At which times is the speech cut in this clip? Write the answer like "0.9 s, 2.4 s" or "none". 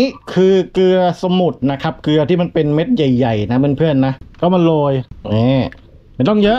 4.2 s, 5.1 s